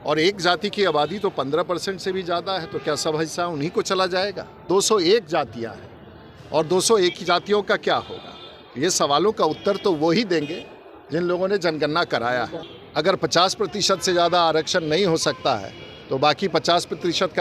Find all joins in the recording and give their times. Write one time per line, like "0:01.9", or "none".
0:04.6
0:12.6

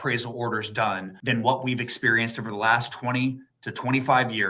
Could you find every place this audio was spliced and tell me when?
0:01.1

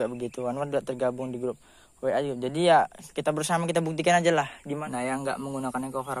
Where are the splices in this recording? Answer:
0:04.6

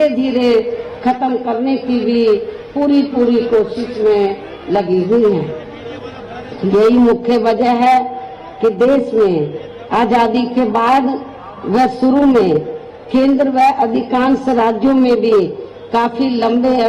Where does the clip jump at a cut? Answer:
0:12.6

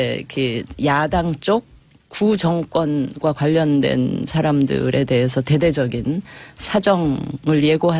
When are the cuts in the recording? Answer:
0:01.3

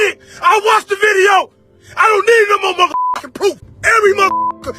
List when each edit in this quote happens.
0:03.7

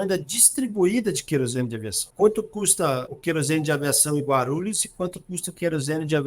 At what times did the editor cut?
0:02.1
0:03.1

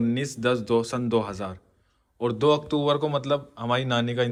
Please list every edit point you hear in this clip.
none

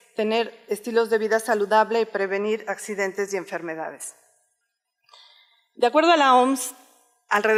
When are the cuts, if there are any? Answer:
none

